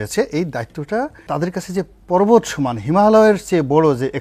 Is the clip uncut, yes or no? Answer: no